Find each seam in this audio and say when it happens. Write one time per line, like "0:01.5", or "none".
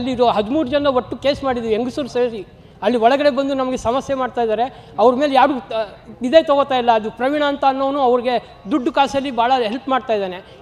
none